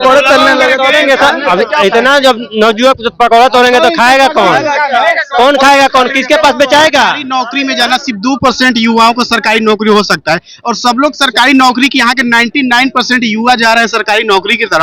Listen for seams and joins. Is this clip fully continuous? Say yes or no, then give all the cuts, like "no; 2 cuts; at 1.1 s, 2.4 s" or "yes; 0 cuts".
no; 1 cut; at 7.2 s